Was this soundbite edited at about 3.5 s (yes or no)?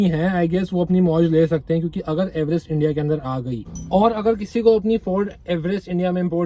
yes